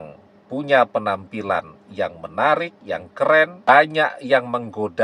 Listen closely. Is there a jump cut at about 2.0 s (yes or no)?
no